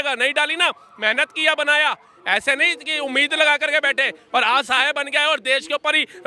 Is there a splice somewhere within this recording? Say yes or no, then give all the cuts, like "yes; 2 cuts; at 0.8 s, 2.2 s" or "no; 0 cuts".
no; 0 cuts